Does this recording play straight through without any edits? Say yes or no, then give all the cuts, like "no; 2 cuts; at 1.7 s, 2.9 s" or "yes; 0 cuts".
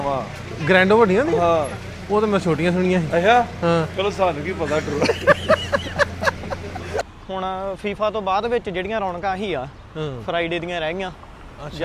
no; 1 cut; at 7.0 s